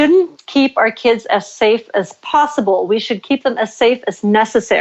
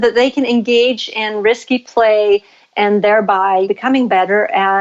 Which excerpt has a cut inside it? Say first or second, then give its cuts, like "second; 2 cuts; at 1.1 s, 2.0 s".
second; 1 cut; at 3.7 s